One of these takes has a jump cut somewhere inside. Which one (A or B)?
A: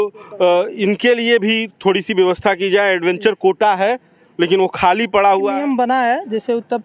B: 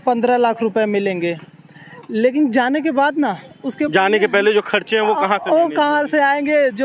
A